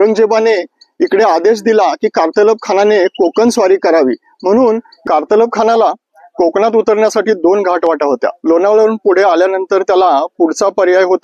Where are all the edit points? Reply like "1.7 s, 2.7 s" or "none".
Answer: 4.9 s